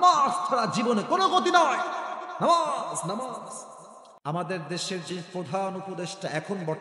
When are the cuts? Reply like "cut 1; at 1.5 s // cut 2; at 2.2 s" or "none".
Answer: cut 1; at 4.2 s